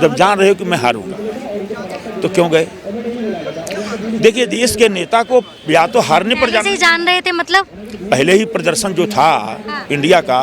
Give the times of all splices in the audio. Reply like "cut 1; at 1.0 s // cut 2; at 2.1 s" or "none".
none

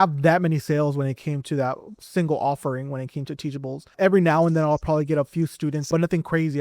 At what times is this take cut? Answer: cut 1; at 4.0 s // cut 2; at 5.9 s

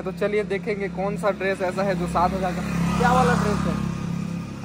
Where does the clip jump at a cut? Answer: none

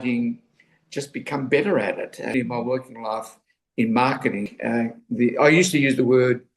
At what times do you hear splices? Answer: cut 1; at 2.3 s // cut 2; at 4.5 s

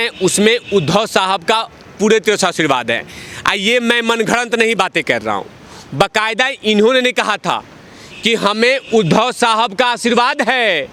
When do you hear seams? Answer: none

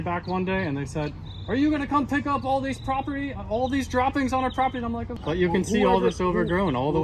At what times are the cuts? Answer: cut 1; at 5.1 s

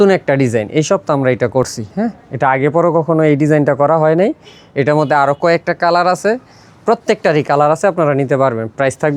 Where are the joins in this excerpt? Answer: none

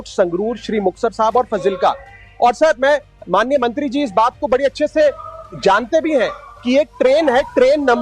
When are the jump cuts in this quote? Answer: none

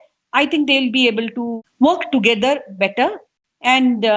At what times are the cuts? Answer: cut 1; at 1.6 s

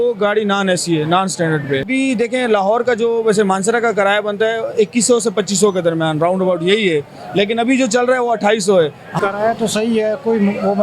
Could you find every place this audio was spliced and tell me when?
cut 1; at 1.9 s // cut 2; at 9.0 s

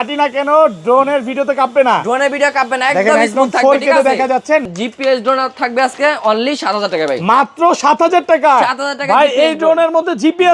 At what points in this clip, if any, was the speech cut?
cut 1; at 4.7 s

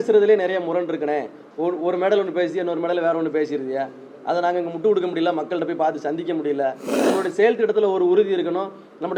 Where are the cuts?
cut 1; at 6.9 s

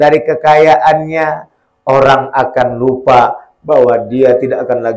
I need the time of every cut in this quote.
none

